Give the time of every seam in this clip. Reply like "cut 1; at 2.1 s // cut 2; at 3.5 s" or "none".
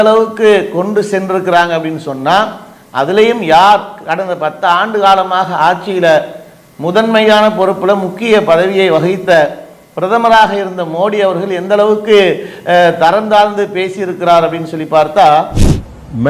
none